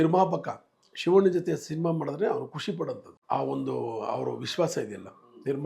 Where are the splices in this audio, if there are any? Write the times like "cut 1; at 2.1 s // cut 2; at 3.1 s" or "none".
none